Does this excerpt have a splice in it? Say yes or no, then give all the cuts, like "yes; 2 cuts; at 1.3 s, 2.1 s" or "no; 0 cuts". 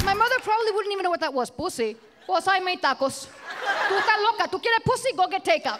yes; 2 cuts; at 2.1 s, 3.9 s